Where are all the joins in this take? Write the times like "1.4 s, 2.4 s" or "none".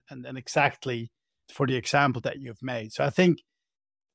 1.3 s